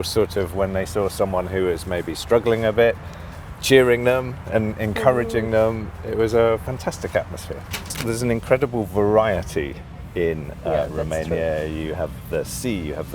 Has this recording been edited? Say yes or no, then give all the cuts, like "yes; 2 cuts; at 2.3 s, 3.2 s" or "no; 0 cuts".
yes; 1 cut; at 8.0 s